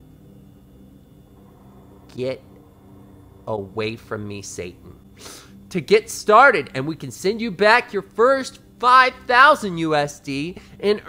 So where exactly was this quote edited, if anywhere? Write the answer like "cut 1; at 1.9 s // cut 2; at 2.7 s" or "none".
none